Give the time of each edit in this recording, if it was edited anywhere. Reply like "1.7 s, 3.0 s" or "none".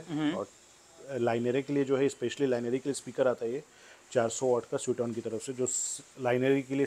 none